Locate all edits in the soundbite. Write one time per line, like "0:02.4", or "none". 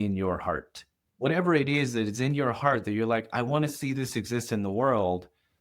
0:01.0